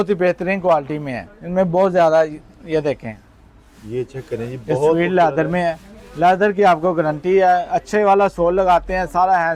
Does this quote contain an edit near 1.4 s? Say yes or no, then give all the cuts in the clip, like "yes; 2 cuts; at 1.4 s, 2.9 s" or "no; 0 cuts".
no; 0 cuts